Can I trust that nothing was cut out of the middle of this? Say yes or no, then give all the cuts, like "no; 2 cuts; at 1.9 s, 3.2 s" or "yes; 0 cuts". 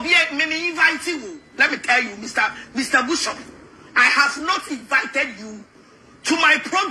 yes; 0 cuts